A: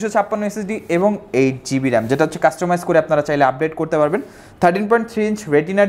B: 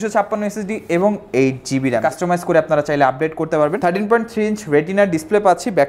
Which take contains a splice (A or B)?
B